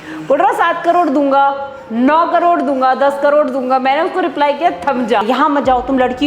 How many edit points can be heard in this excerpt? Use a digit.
1